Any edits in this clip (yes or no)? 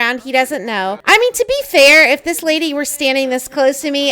yes